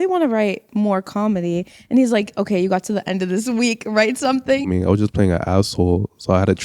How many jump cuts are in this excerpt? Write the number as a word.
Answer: one